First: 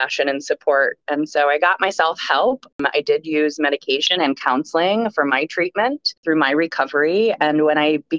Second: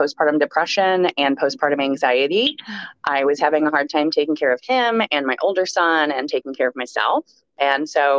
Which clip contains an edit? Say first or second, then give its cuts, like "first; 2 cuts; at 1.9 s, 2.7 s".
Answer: first; 2 cuts; at 2.7 s, 6.1 s